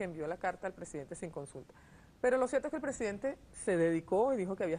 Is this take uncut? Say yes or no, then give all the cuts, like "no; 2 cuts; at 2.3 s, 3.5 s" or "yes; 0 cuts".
no; 1 cut; at 1.9 s